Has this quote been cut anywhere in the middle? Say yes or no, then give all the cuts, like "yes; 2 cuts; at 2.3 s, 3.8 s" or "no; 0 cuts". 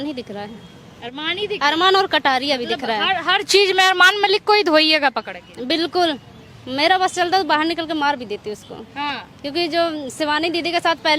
no; 0 cuts